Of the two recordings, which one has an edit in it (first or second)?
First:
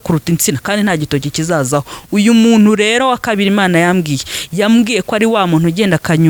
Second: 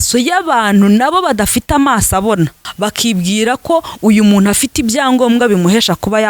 second